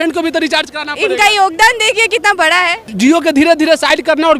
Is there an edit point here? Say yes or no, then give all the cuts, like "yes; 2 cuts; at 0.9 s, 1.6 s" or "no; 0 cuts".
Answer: yes; 1 cut; at 2.9 s